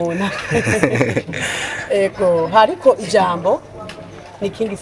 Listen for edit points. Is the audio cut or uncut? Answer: uncut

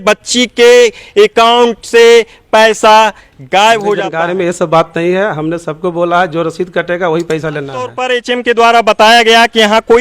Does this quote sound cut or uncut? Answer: cut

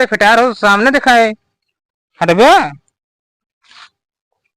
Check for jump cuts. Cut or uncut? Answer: uncut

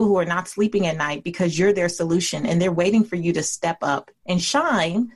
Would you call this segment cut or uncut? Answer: cut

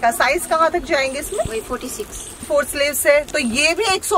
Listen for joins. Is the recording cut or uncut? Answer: cut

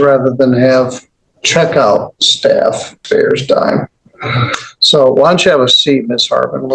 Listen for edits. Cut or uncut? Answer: cut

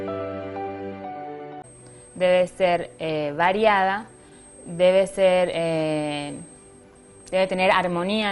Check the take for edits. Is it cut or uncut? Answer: uncut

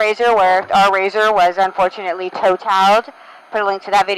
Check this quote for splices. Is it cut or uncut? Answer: uncut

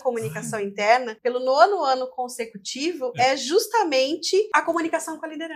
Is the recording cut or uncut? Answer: cut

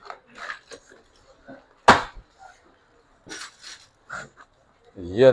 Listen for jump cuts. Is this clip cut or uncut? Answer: cut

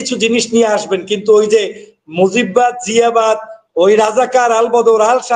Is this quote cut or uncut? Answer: uncut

